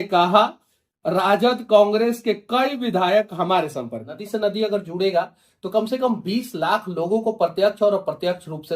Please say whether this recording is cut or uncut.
cut